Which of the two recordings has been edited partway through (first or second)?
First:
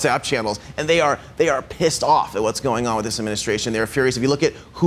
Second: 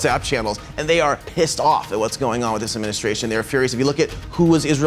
second